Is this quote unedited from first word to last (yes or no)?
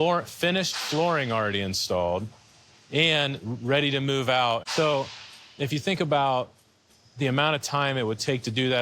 no